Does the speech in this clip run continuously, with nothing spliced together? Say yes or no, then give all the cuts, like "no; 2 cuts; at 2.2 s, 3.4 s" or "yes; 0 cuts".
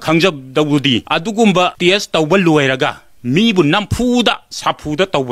no; 2 cuts; at 1.1 s, 1.7 s